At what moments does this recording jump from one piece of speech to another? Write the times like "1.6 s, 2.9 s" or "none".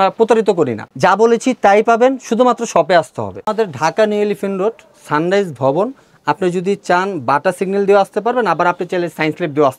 3.5 s